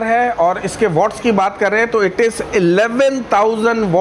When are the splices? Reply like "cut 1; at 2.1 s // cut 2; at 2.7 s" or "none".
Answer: none